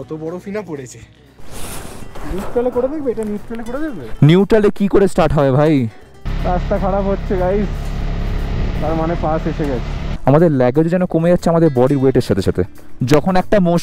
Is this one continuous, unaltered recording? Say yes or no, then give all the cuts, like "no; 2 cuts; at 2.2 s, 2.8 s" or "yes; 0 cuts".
no; 4 cuts; at 1.4 s, 6.3 s, 10.2 s, 12.8 s